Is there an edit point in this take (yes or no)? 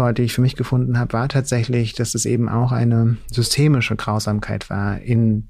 no